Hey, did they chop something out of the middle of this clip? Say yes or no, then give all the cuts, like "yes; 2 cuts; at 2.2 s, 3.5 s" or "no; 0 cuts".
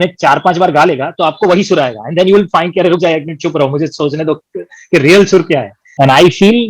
yes; 1 cut; at 5.8 s